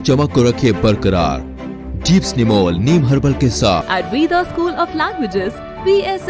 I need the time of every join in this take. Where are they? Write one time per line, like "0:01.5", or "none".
0:03.9